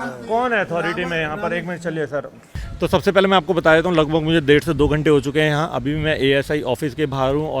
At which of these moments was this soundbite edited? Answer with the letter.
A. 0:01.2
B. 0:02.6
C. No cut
B